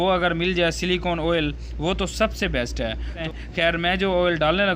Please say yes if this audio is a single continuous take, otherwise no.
no